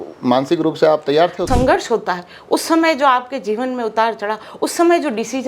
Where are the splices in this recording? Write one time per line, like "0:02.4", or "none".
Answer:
0:01.5